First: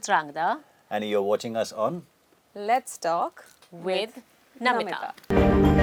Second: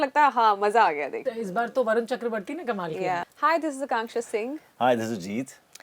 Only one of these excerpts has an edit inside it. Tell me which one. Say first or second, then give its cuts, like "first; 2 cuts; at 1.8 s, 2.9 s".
second; 2 cuts; at 1.1 s, 3.2 s